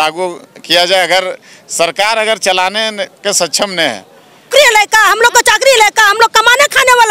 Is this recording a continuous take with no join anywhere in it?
no; 1 cut; at 4.5 s

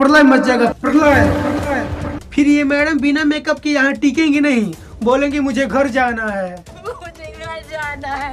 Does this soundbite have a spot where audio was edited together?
no; 0 cuts

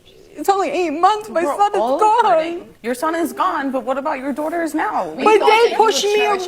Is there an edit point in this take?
yes; 1 cut; at 2.7 s

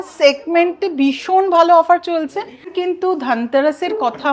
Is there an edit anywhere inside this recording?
yes; 1 cut; at 2.7 s

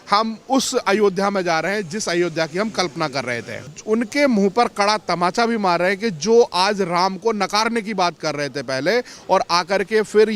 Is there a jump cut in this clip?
yes; 1 cut; at 3.7 s

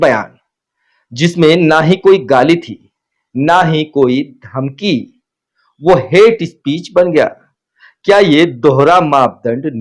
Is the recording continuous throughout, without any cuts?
yes; 0 cuts

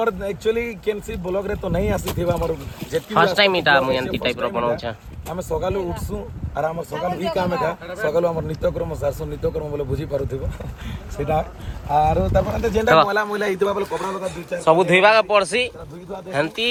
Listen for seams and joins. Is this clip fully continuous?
yes; 0 cuts

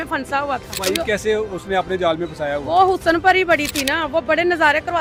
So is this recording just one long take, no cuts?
yes; 0 cuts

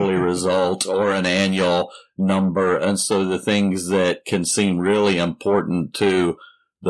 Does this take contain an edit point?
no; 0 cuts

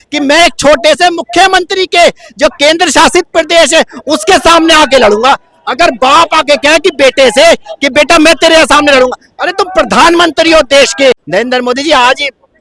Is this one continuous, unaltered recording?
no; 1 cut; at 11.2 s

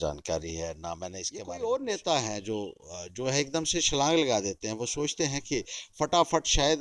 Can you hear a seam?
yes; 1 cut; at 1.3 s

